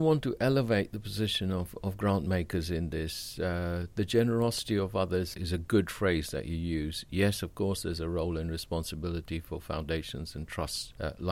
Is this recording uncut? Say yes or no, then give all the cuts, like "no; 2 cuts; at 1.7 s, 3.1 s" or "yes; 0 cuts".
yes; 0 cuts